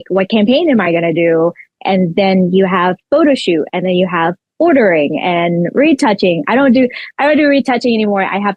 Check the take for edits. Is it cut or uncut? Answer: uncut